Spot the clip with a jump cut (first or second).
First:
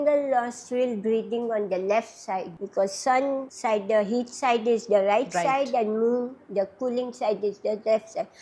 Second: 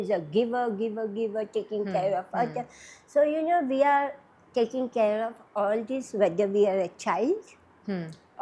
first